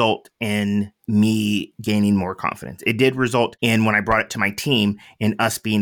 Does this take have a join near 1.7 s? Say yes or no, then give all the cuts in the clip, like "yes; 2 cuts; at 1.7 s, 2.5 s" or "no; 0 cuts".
yes; 3 cuts; at 1.0 s, 1.7 s, 3.5 s